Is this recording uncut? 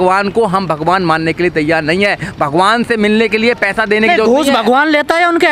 yes; 0 cuts

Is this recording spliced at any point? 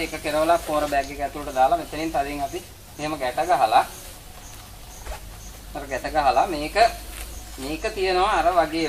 no; 0 cuts

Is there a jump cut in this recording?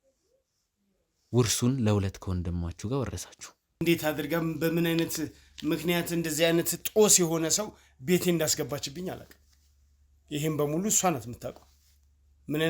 yes; 1 cut; at 3.8 s

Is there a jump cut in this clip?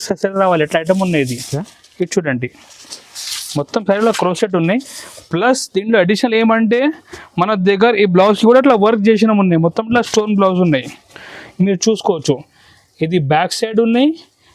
no; 0 cuts

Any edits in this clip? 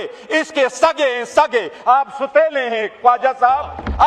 no; 0 cuts

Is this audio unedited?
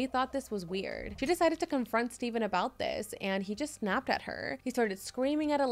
no; 2 cuts; at 1.0 s, 4.5 s

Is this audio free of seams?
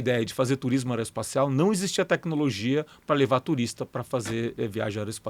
yes; 0 cuts

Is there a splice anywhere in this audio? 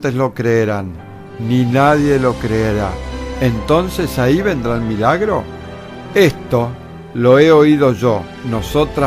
yes; 1 cut; at 3.9 s

